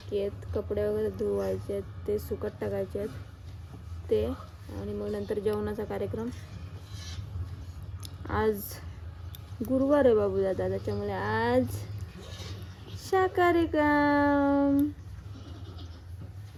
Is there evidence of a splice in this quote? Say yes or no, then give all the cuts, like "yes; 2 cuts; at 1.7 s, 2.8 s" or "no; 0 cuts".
no; 0 cuts